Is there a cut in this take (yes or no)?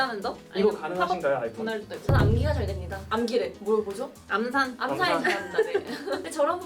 no